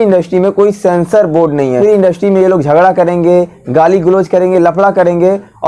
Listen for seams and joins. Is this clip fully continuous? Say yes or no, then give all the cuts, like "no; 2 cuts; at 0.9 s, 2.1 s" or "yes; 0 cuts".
no; 1 cut; at 1.8 s